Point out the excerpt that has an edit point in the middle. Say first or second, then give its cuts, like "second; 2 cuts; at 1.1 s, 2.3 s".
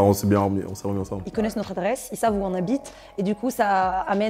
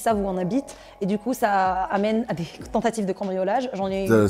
first; 1 cut; at 1.2 s